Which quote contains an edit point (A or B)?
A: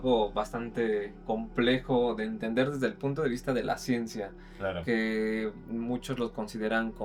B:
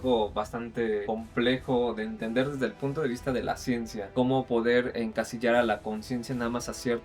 B